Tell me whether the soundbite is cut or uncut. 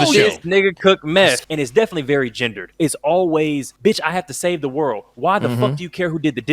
cut